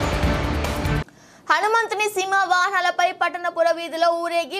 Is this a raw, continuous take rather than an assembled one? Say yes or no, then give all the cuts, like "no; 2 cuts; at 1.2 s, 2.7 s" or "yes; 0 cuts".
no; 1 cut; at 1.0 s